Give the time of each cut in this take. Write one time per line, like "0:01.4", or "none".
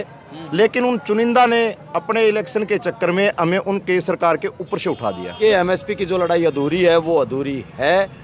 0:05.4